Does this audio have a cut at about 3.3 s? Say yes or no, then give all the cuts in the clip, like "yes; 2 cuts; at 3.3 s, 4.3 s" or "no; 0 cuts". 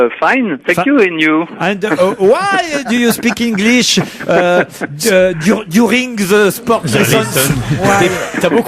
yes; 1 cut; at 3.3 s